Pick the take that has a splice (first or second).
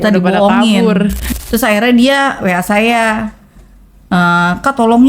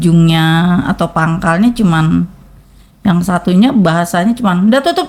first